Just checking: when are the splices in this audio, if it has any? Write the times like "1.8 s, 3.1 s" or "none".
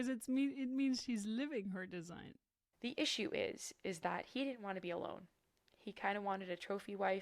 2.7 s